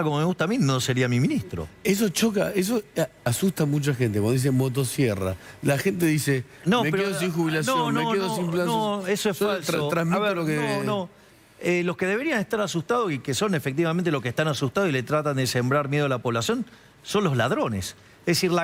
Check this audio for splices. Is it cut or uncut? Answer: uncut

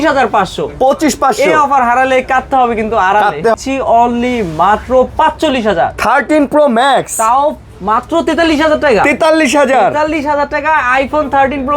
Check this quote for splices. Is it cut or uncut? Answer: cut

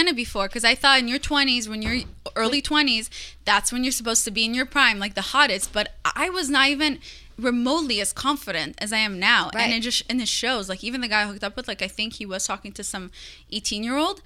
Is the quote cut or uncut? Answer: uncut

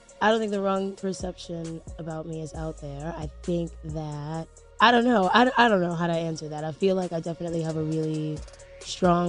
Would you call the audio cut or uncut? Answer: uncut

